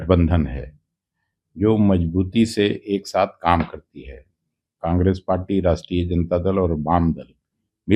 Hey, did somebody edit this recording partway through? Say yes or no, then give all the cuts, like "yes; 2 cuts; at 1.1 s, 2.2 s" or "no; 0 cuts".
no; 0 cuts